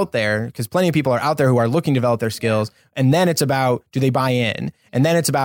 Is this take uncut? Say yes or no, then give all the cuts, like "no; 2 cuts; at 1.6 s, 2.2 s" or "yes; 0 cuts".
yes; 0 cuts